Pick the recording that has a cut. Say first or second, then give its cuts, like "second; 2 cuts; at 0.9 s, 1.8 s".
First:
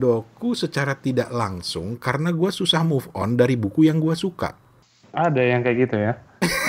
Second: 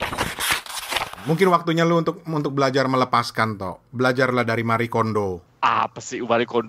second; 1 cut; at 1.1 s